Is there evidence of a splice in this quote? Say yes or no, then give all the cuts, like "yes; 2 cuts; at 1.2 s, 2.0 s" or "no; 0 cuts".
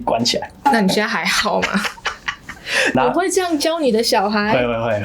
yes; 1 cut; at 2.9 s